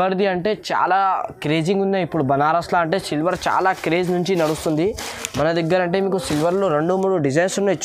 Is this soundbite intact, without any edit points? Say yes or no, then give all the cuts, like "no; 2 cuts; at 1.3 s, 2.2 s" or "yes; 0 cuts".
yes; 0 cuts